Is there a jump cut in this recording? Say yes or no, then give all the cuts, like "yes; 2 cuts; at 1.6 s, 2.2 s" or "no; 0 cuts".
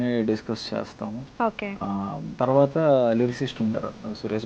yes; 1 cut; at 2.3 s